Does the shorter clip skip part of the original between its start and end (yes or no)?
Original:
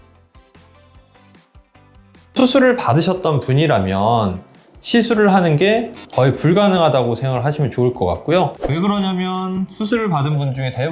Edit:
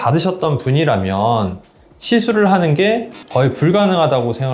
no